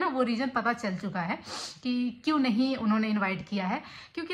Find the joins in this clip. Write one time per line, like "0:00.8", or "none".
none

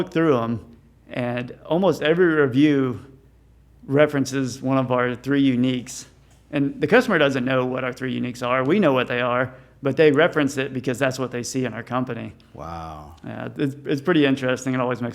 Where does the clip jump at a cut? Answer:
none

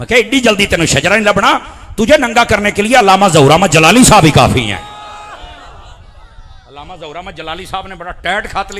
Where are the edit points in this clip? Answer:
none

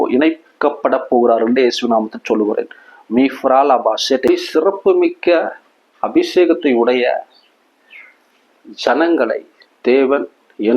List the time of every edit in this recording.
0:01.0
0:04.3

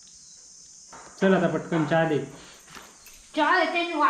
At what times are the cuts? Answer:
0:01.0

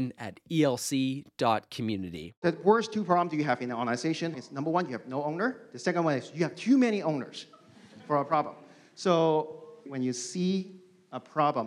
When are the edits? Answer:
0:02.4
0:04.4

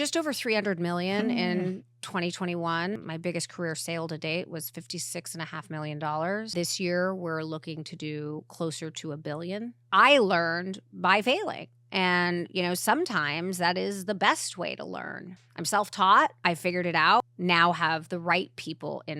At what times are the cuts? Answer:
0:03.0
0:06.5
0:09.8
0:16.9

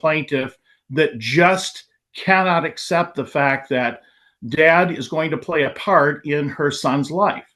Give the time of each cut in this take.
none

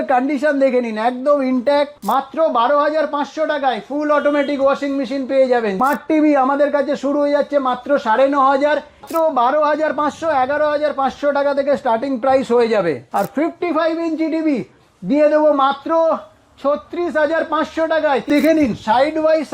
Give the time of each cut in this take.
0:02.0
0:05.8
0:09.0
0:13.0
0:18.3

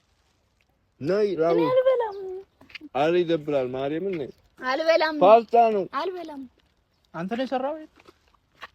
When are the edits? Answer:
none

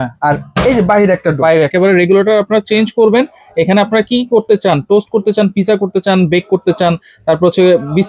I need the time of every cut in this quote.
0:01.7

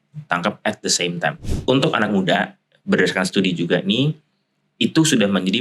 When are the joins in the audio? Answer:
0:01.5

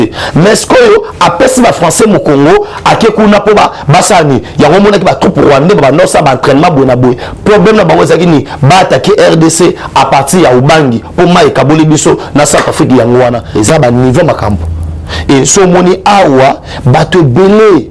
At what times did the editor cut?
0:13.5

